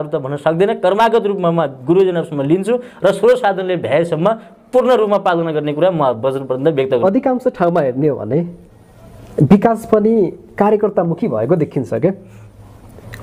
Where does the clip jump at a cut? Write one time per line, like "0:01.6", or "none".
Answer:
0:07.0